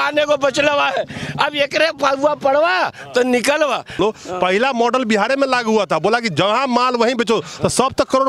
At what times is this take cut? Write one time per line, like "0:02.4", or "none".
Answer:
0:04.0